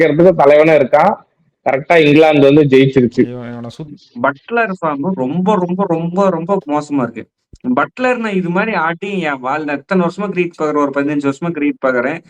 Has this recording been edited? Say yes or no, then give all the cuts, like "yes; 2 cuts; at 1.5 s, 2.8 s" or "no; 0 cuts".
yes; 1 cut; at 3.9 s